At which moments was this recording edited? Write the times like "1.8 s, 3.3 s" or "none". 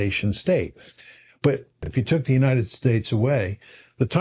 1.9 s